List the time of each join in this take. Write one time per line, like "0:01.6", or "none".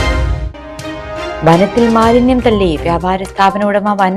0:01.3